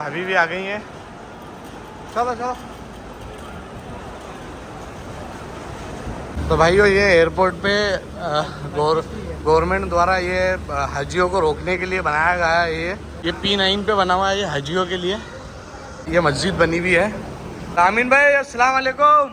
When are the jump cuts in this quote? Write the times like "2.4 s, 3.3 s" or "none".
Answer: 6.3 s, 13.1 s, 16.1 s, 17.7 s